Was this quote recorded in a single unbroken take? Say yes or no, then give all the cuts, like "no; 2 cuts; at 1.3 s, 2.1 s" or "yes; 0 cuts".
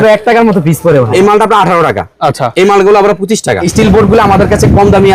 no; 2 cuts; at 1.1 s, 3.6 s